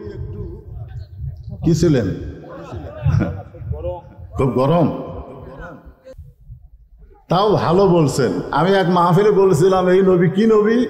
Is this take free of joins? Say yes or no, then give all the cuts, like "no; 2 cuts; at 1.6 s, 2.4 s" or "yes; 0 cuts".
no; 1 cut; at 6.3 s